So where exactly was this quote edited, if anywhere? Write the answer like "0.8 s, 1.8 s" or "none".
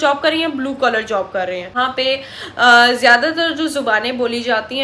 1.7 s